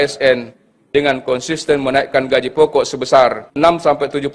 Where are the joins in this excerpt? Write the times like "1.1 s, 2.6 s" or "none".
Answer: 3.5 s